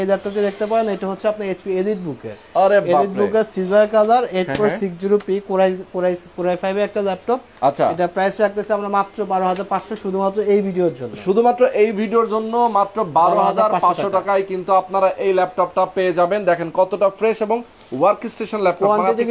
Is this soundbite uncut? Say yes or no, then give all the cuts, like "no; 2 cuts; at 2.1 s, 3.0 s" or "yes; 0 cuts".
yes; 0 cuts